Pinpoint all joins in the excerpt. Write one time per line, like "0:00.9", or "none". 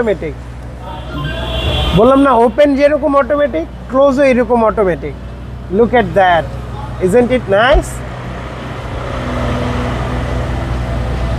none